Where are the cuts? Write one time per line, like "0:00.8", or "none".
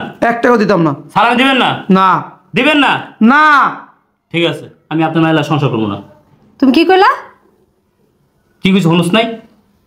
none